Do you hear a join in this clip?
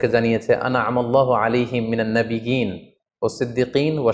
no; 0 cuts

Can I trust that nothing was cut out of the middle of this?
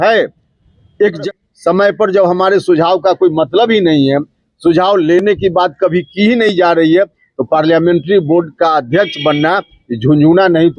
no; 1 cut; at 1.2 s

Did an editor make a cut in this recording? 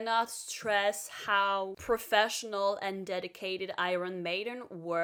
no; 0 cuts

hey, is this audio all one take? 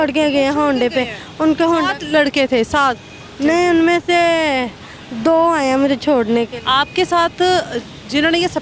yes; 0 cuts

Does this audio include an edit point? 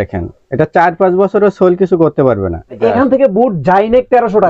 yes; 1 cut; at 2.8 s

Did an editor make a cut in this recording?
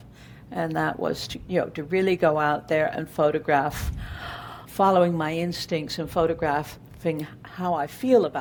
no; 0 cuts

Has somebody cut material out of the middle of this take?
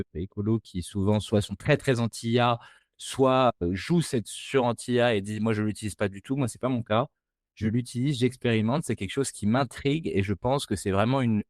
no; 0 cuts

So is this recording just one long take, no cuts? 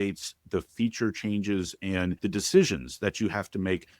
no; 1 cut; at 2.2 s

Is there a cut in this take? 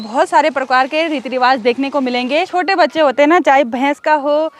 yes; 1 cut; at 2.5 s

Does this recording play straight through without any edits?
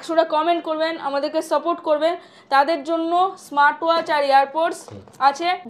yes; 0 cuts

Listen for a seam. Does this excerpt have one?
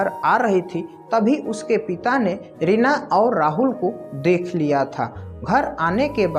no; 0 cuts

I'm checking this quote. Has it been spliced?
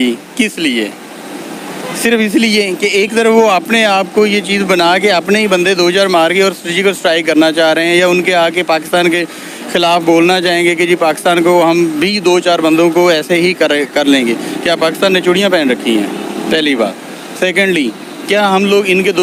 no; 0 cuts

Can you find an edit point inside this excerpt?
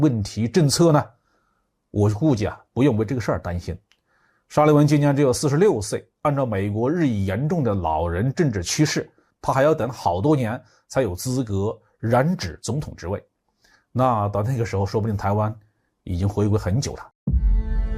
yes; 1 cut; at 17.1 s

